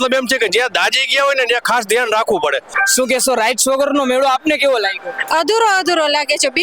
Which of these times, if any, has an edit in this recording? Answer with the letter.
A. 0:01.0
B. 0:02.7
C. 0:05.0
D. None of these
B